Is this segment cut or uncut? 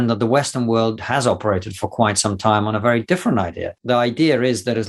cut